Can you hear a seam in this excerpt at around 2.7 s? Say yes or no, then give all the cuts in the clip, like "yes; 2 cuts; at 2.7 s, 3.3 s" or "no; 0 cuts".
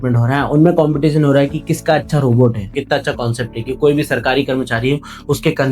yes; 1 cut; at 2.7 s